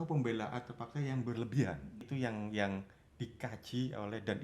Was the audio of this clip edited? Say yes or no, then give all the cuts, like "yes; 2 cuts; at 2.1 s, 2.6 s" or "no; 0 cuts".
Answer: yes; 1 cut; at 2.1 s